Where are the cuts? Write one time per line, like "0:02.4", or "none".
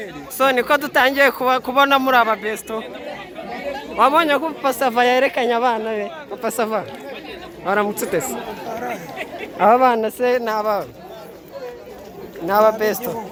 none